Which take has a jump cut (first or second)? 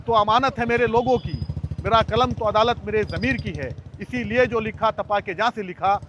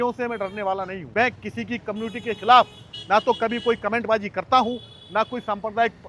second